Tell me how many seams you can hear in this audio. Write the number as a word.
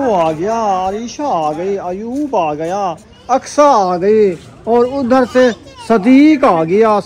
two